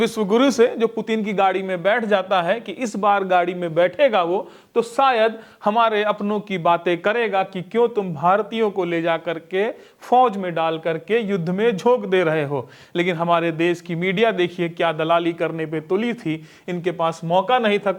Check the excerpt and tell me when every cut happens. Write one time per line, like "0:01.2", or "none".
none